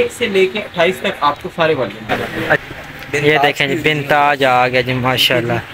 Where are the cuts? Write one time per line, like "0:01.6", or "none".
0:02.6